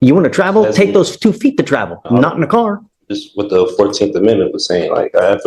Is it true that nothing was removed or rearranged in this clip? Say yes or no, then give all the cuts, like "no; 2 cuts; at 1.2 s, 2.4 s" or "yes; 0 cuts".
yes; 0 cuts